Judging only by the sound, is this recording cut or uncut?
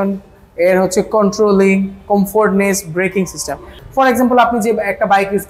cut